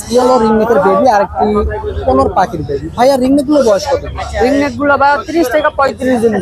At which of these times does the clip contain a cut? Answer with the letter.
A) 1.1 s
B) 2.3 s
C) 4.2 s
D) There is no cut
D